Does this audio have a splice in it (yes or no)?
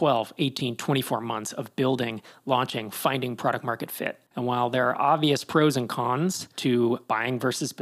yes